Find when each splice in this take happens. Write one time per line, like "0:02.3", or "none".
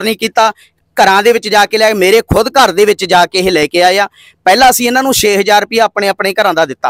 none